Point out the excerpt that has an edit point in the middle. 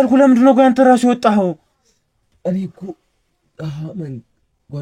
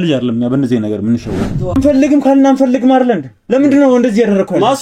second; 1 cut; at 1.8 s

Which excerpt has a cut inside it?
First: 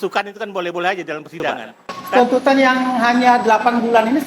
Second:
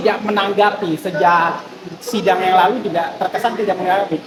first; 1 cut; at 2.2 s

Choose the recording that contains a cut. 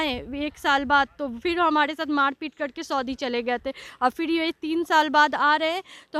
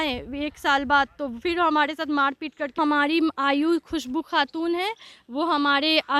second; 1 cut; at 2.7 s

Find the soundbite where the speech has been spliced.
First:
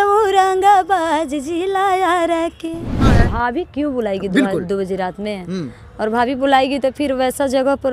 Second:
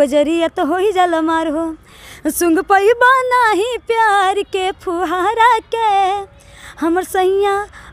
first; 1 cut; at 3.1 s

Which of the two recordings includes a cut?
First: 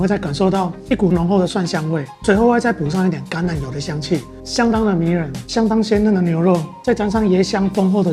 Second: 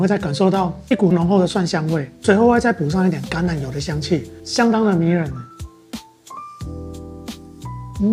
first; 1 cut; at 5.4 s

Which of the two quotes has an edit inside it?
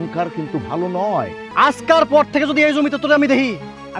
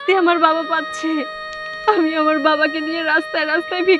first; 1 cut; at 1.4 s

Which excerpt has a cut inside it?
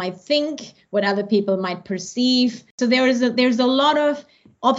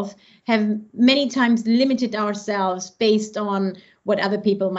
first; 1 cut; at 2.7 s

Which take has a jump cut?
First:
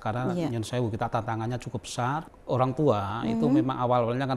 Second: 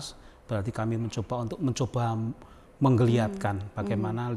first; 1 cut; at 2.2 s

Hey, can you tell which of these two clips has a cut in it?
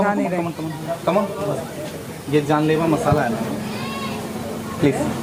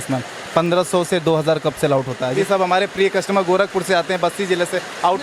second; 1 cut; at 2.4 s

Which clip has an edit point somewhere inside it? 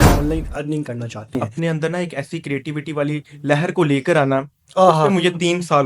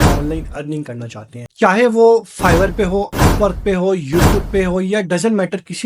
first; 1 cut; at 1.4 s

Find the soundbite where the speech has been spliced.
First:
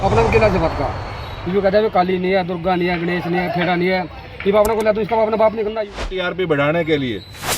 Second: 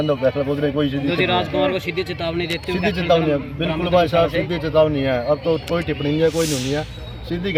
first; 1 cut; at 6.2 s

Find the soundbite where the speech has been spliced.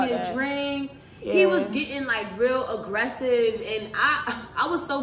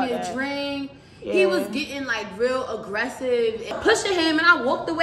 second; 1 cut; at 3.8 s

